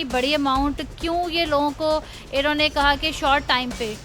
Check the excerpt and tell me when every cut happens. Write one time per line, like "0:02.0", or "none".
none